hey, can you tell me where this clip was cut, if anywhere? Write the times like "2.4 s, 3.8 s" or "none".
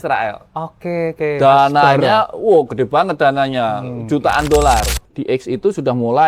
5.1 s